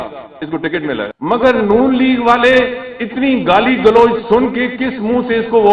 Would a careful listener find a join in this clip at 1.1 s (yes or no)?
yes